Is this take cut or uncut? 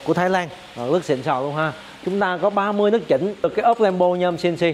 cut